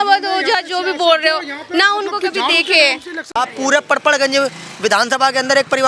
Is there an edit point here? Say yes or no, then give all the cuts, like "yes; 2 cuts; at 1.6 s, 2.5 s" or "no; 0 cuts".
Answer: yes; 1 cut; at 3.4 s